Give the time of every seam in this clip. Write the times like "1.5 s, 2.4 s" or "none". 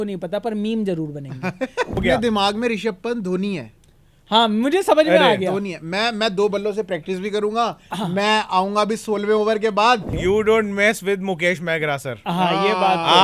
2.0 s, 10.1 s